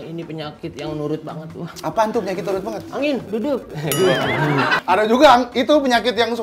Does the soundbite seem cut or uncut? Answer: cut